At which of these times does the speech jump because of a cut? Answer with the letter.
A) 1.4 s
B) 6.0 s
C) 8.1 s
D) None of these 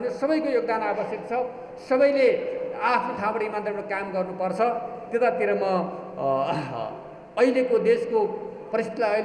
D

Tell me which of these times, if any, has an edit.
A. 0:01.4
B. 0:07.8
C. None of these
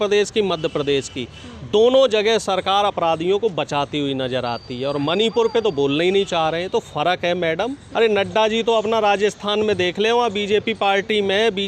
B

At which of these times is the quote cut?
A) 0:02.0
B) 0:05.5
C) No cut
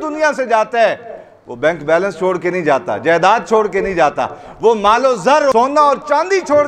B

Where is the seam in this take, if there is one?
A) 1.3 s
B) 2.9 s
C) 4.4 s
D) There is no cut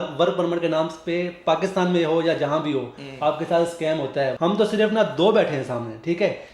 C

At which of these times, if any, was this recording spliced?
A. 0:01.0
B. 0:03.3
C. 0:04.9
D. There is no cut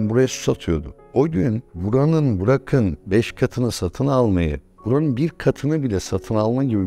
A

